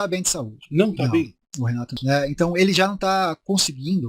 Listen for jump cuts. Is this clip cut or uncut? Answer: cut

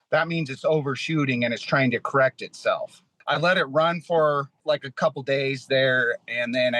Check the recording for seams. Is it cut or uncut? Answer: cut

